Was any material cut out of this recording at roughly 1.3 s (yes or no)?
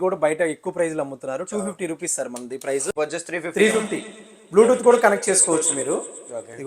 no